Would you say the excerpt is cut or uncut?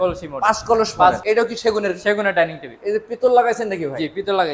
cut